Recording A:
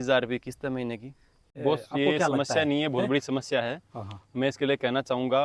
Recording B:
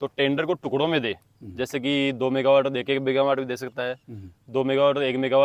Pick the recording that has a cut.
A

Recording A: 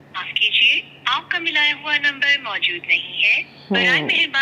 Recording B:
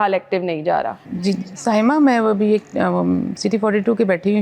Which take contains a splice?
B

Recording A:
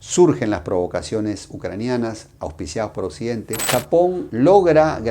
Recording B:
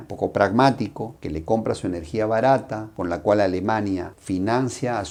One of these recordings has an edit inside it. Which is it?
A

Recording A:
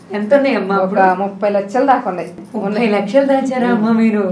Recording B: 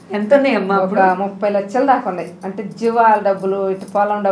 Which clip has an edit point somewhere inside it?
A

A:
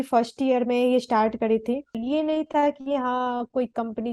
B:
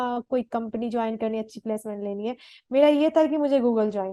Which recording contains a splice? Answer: A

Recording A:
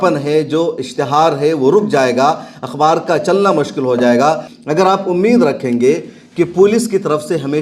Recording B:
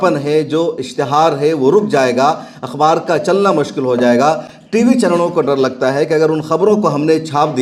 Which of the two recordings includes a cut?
A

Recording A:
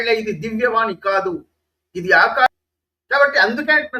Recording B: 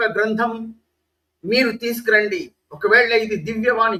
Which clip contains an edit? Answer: A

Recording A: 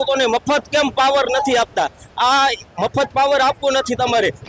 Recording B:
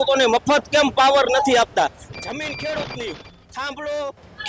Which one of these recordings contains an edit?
B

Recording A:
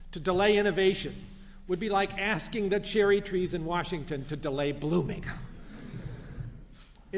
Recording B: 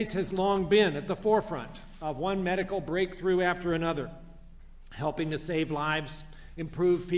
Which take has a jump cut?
B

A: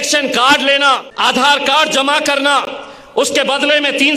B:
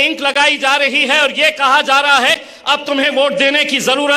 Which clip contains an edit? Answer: A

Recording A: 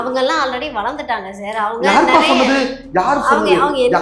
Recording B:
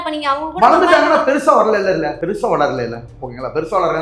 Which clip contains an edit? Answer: B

